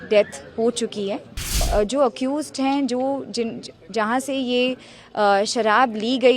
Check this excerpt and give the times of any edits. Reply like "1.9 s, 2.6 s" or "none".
1.7 s